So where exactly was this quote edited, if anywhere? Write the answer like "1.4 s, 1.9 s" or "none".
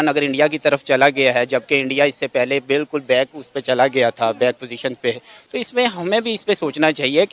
none